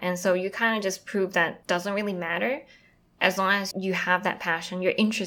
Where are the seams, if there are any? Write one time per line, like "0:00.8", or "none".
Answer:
0:01.6
0:03.7